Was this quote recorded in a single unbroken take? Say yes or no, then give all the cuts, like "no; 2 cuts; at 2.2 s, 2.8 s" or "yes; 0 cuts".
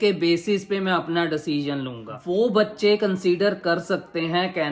no; 1 cut; at 2.1 s